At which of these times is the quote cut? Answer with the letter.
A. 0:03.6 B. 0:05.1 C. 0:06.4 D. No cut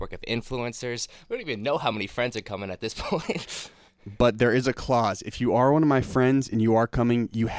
D